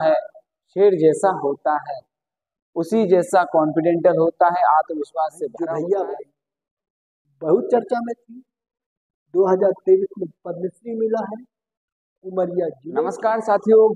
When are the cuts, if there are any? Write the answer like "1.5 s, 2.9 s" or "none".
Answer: 5.5 s, 12.9 s